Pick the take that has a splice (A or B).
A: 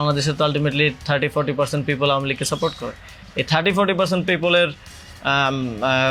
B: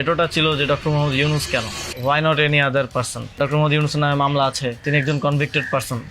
B